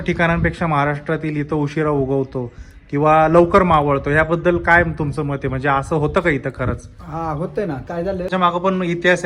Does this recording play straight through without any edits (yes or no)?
no